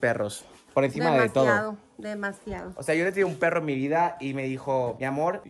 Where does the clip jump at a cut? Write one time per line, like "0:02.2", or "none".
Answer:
none